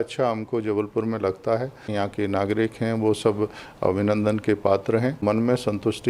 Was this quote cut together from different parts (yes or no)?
yes